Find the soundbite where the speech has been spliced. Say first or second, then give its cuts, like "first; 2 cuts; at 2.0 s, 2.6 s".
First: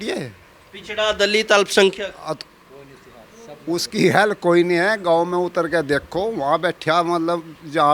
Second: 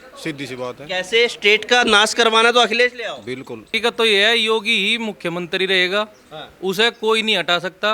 second; 1 cut; at 3.7 s